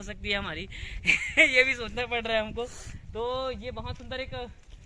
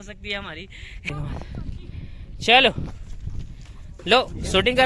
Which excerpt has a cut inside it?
second; 1 cut; at 1.1 s

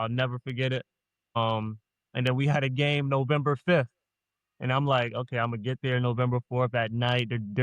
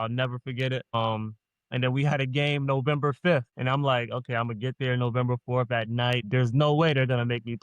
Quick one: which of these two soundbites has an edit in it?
second; 3 cuts; at 0.9 s, 3.5 s, 6.2 s

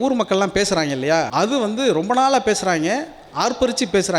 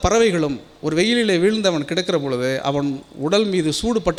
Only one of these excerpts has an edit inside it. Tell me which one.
first; 1 cut; at 1.3 s

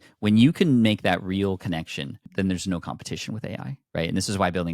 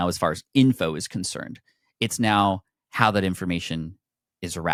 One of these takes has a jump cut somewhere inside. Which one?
first; 2 cuts; at 2.2 s, 3.7 s

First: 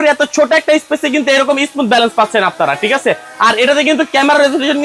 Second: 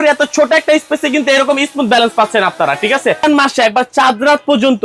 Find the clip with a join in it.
second; 1 cut; at 3.2 s

